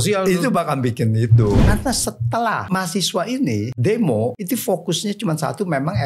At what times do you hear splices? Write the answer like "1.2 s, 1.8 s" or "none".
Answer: 1.6 s, 2.7 s, 3.7 s, 4.4 s